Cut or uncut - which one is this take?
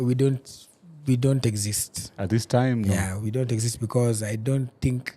uncut